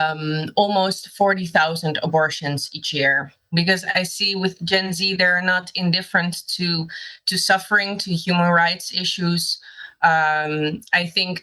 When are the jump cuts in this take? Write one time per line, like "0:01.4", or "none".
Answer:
0:03.5